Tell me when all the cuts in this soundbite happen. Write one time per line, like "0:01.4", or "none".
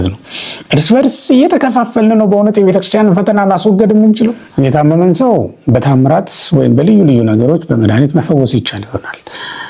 0:04.4